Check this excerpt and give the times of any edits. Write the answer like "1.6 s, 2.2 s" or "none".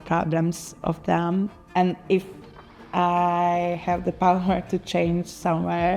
1.6 s